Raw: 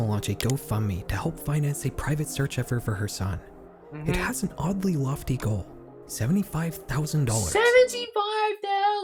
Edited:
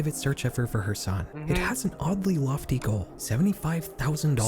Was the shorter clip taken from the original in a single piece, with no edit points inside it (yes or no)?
no